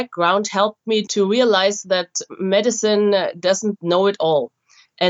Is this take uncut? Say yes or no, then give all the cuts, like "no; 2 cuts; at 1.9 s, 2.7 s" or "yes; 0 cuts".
no; 1 cut; at 1.1 s